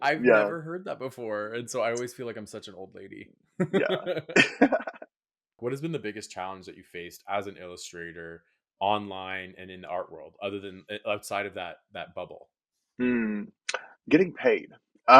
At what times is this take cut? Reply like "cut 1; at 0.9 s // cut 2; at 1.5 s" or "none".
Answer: cut 1; at 5.5 s